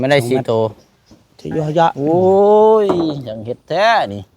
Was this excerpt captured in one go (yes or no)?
no